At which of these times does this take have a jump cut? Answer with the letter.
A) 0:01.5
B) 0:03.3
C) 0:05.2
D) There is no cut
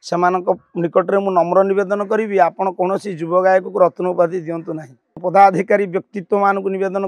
C